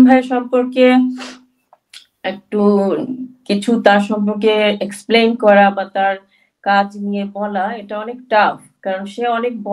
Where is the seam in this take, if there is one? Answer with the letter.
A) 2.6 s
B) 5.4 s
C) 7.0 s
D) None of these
D